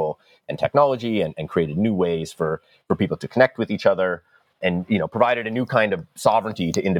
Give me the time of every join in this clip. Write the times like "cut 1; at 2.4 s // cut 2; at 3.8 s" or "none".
cut 1; at 4.5 s